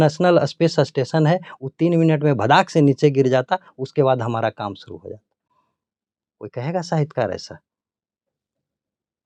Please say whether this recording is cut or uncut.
uncut